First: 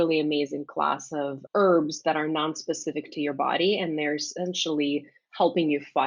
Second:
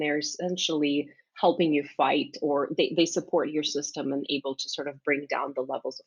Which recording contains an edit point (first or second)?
first